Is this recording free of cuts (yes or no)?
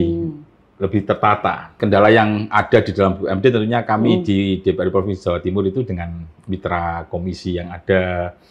no